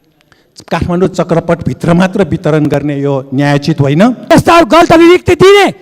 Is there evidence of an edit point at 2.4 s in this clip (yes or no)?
no